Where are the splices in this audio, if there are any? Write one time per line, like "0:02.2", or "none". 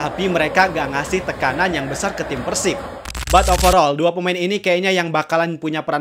0:03.1